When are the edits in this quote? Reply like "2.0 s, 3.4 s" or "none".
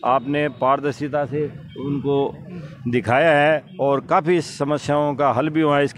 none

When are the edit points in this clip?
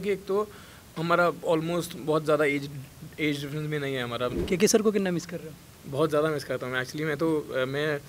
4.4 s

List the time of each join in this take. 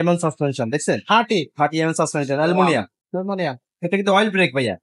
none

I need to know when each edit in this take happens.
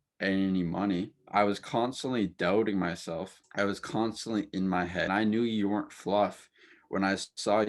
1.2 s, 3.4 s, 5.1 s

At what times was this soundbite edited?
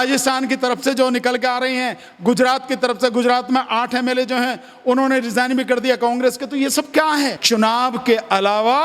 7.4 s

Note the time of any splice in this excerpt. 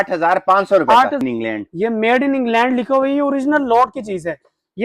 1.2 s

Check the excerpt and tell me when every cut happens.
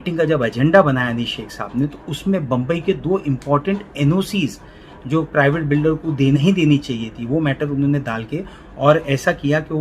6.4 s

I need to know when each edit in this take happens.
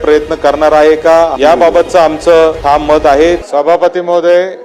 1.3 s

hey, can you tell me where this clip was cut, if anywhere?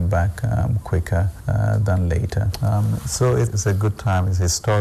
1.3 s

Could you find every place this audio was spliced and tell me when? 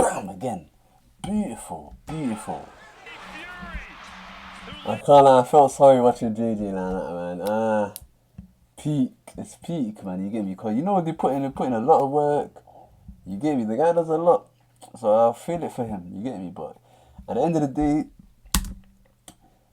3.5 s

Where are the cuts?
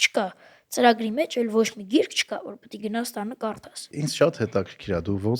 3.9 s

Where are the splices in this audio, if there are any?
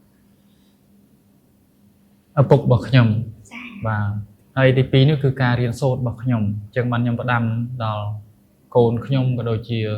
4.2 s

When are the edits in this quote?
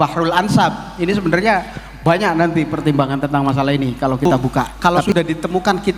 4.7 s

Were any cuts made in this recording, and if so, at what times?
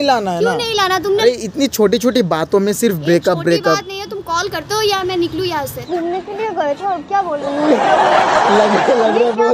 1.2 s, 5.8 s

